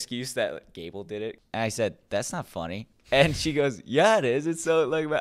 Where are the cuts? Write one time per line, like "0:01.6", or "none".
0:01.4

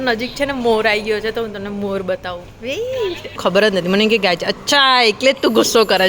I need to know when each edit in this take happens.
0:03.4

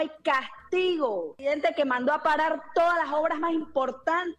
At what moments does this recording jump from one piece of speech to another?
0:01.3

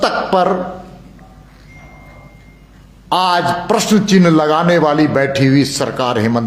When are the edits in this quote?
none

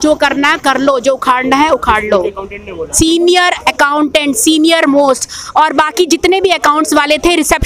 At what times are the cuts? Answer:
none

